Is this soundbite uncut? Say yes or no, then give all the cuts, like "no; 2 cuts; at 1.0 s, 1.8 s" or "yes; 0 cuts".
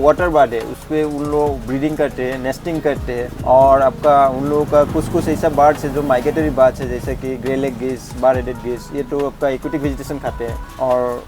yes; 0 cuts